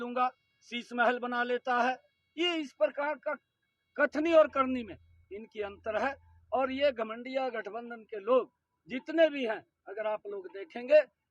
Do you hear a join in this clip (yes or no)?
no